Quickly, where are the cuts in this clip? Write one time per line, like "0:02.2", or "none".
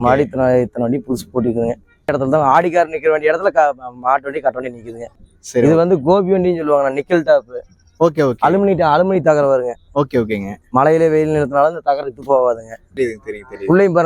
0:02.1
0:05.1
0:12.9